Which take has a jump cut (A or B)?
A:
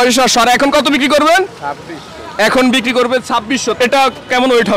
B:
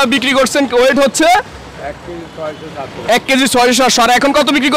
A